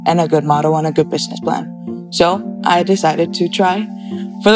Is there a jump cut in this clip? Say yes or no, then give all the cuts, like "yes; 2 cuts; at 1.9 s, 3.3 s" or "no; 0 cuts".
no; 0 cuts